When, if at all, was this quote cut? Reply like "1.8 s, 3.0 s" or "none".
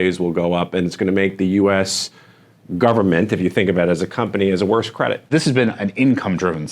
5.3 s

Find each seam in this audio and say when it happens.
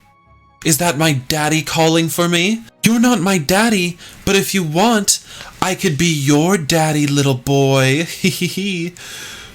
2.7 s

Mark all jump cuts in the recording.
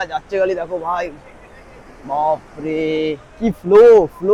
none

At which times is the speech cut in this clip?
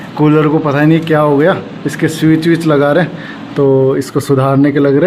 none

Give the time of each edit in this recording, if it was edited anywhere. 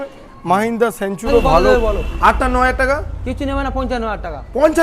1.6 s

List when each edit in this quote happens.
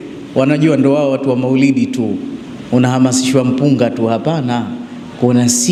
none

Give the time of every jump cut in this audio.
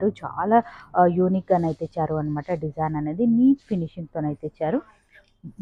none

